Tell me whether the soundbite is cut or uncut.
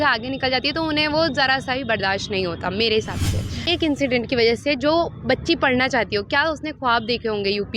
cut